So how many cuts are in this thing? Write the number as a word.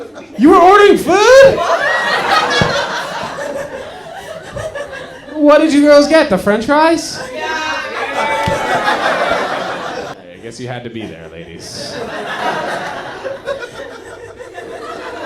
one